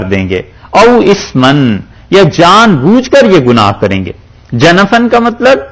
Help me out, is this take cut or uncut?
uncut